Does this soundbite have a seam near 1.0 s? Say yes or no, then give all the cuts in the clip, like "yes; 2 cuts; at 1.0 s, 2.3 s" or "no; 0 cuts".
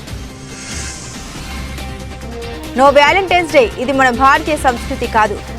yes; 2 cuts; at 1.0 s, 2.7 s